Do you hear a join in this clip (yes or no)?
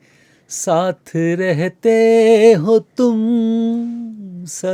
no